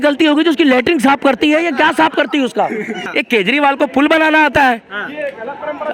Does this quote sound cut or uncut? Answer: cut